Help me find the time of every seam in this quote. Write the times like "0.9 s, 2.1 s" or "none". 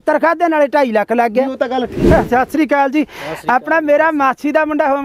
1.9 s